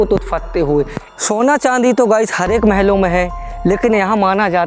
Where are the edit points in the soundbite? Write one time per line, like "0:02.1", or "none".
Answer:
0:01.0